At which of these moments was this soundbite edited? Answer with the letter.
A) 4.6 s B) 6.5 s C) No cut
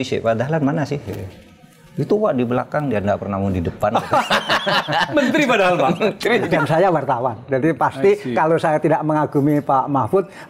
B